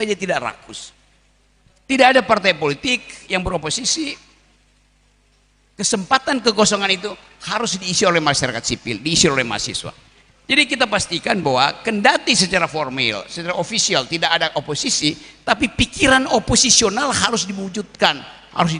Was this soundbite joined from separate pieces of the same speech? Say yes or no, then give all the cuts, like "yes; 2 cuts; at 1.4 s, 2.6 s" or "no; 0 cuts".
no; 0 cuts